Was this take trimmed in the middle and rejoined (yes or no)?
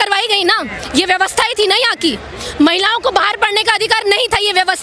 no